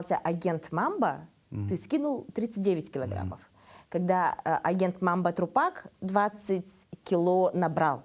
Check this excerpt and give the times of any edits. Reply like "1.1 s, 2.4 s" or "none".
none